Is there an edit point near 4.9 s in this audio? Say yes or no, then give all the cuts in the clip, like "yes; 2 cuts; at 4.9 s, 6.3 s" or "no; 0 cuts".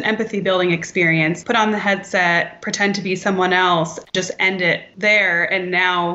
yes; 2 cuts; at 1.4 s, 4.9 s